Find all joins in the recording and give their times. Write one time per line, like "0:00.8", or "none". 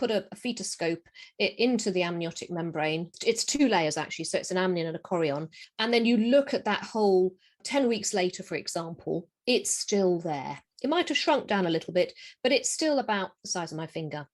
0:07.6